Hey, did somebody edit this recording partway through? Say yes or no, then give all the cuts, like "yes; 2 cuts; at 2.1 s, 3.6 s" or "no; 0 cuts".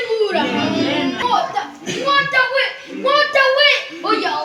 yes; 1 cut; at 1.2 s